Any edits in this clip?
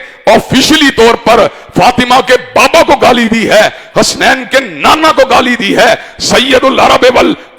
no; 0 cuts

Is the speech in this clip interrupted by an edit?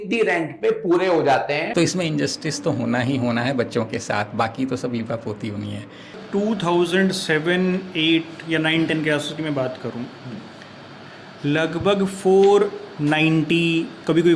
yes; 2 cuts; at 1.7 s, 6.2 s

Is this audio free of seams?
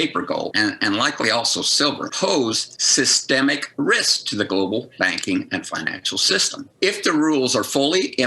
no; 1 cut; at 6.6 s

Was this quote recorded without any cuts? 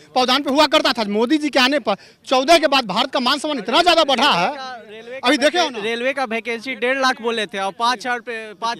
yes; 0 cuts

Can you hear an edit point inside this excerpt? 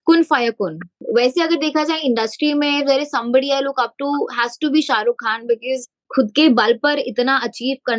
yes; 2 cuts; at 1.0 s, 6.0 s

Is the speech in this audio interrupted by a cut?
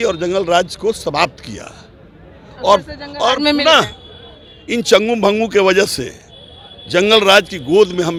no; 0 cuts

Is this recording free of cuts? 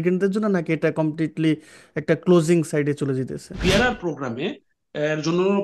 no; 1 cut; at 3.5 s

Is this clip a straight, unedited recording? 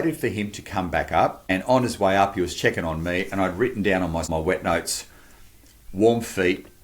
no; 2 cuts; at 1.4 s, 4.3 s

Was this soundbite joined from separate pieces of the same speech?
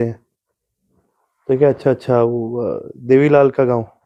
no; 0 cuts

